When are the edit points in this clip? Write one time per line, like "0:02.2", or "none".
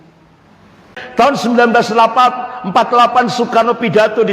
0:00.9